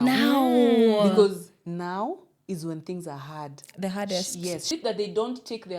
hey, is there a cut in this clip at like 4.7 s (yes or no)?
yes